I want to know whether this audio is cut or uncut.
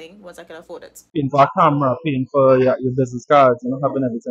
cut